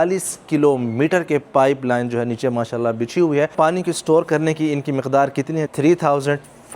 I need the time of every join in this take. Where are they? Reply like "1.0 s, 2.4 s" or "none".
3.5 s, 5.6 s